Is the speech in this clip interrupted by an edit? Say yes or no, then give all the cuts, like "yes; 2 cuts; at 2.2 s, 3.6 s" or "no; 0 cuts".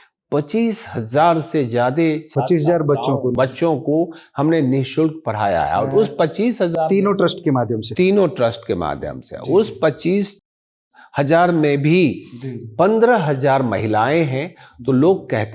no; 0 cuts